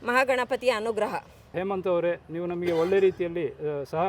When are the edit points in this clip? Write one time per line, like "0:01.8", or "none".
0:01.4